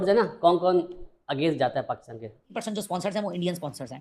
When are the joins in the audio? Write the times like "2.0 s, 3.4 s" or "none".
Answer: 2.6 s